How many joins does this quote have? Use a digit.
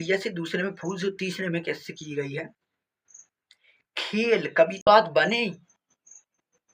1